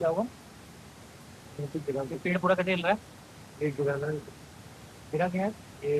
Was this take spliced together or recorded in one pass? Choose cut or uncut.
uncut